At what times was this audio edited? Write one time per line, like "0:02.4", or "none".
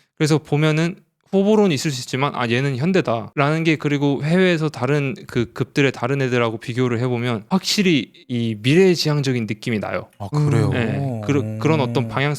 0:03.3
0:07.4
0:08.2